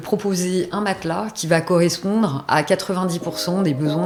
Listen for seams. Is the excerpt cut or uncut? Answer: uncut